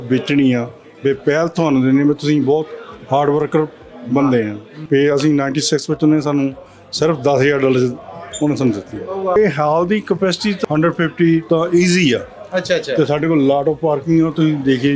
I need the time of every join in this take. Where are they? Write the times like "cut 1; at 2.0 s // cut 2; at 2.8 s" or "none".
cut 1; at 4.7 s // cut 2; at 9.4 s // cut 3; at 10.6 s // cut 4; at 11.4 s

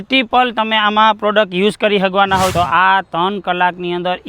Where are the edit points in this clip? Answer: cut 1; at 2.5 s

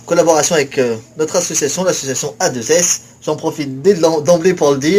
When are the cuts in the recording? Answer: none

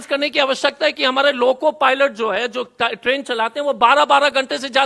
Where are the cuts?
none

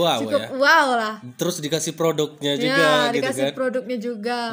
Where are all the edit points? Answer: none

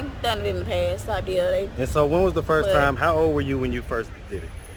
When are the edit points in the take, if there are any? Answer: none

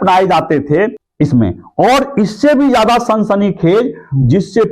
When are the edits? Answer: cut 1; at 1.0 s

